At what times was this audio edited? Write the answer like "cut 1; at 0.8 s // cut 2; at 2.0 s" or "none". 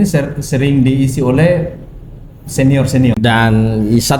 cut 1; at 3.1 s